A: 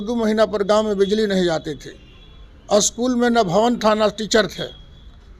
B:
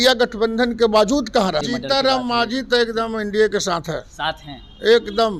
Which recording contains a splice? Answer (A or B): B